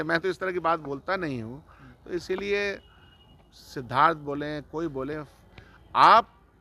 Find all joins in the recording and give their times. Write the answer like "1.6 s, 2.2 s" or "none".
none